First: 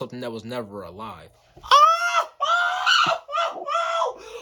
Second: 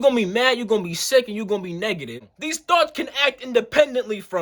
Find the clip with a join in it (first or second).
second